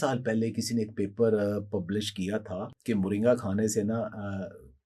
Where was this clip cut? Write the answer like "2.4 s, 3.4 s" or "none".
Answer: 2.7 s